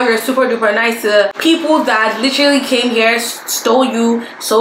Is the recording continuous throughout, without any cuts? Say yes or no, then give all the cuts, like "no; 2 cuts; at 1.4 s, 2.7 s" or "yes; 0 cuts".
no; 1 cut; at 1.3 s